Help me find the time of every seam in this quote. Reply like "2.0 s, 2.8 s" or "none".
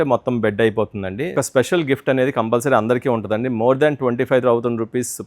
1.3 s